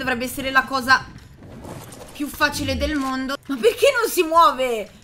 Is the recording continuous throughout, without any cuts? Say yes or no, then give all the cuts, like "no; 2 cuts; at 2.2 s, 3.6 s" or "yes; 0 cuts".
no; 1 cut; at 3.4 s